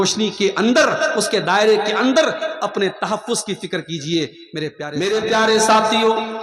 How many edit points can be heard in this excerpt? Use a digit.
1